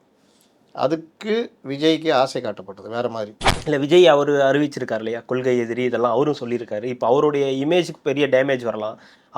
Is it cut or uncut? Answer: cut